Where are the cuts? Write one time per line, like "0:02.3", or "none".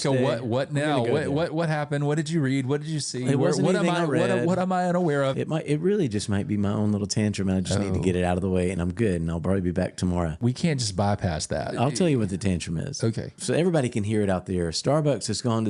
0:05.3
0:10.4
0:11.7
0:13.4